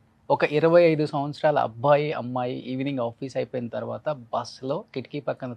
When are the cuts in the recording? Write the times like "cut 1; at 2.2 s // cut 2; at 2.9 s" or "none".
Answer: none